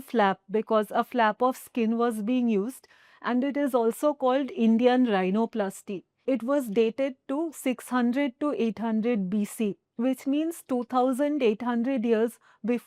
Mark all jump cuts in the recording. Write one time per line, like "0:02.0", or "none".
0:06.2